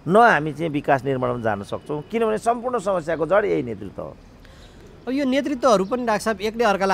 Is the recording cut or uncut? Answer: uncut